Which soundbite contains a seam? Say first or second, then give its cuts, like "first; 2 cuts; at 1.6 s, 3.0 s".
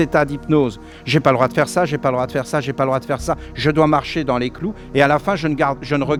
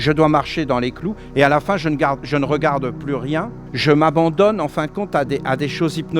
second; 1 cut; at 3.7 s